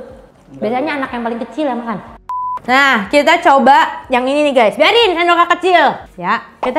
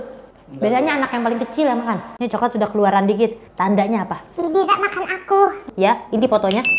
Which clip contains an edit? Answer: second; 2 cuts; at 2.2 s, 5.6 s

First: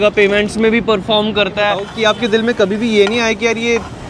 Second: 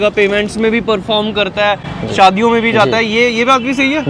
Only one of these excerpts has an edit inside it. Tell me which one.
first; 1 cut; at 1.9 s

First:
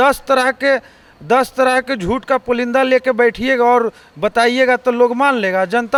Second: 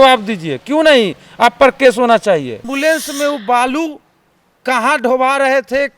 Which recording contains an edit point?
second; 1 cut; at 2.7 s

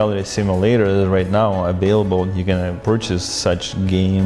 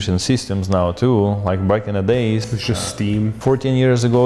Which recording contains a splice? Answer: first; 1 cut; at 2.8 s

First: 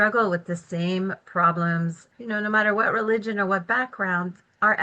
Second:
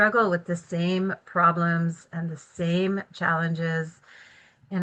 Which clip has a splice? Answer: first; 1 cut; at 2.1 s

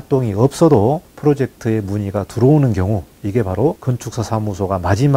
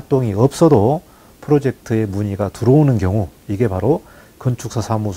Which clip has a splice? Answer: first; 2 cuts; at 1.1 s, 3.9 s

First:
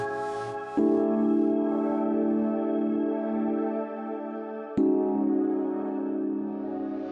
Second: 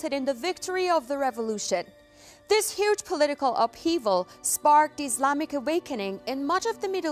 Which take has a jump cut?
first; 1 cut; at 5.3 s

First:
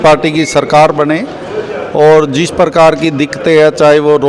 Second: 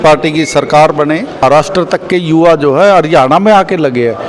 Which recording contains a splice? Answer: second; 1 cut; at 1.4 s

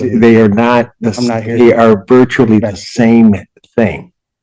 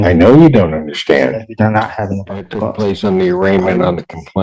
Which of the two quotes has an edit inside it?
second; 1 cut; at 2.7 s

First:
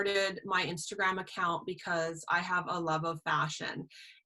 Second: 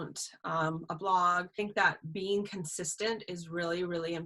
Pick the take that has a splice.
second; 1 cut; at 1.5 s

